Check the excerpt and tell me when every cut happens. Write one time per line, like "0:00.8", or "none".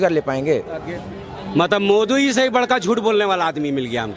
0:00.9